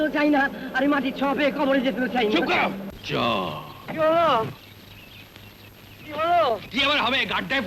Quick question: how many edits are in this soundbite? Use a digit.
1